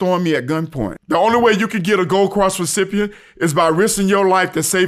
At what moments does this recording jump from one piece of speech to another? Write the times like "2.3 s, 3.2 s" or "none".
0.9 s